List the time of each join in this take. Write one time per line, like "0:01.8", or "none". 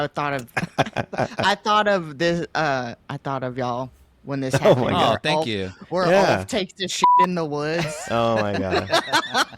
0:03.0